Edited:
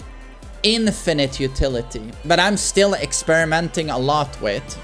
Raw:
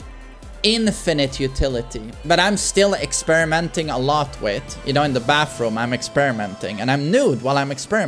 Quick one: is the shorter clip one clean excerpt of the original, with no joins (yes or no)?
yes